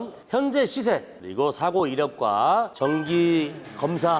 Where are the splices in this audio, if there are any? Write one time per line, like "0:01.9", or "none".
0:01.2
0:02.7

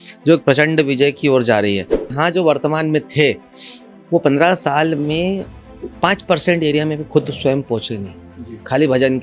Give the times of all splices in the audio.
0:02.2

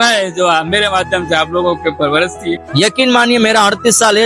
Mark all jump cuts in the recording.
0:02.6

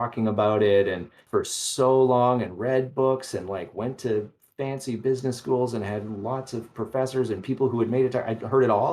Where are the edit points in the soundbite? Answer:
0:01.2

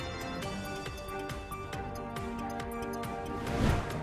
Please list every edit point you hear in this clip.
0:03.1

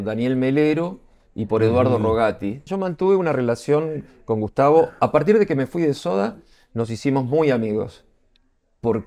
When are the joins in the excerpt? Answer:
0:02.7

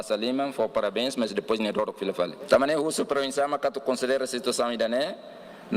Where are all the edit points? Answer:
0:02.4

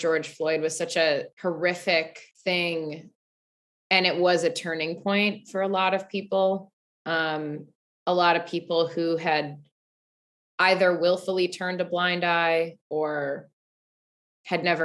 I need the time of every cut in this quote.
0:01.3
0:02.2

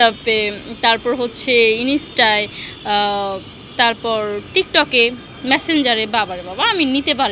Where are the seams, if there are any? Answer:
none

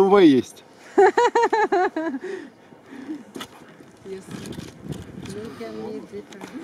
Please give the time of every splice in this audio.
none

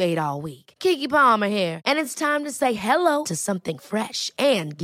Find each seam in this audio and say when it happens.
none

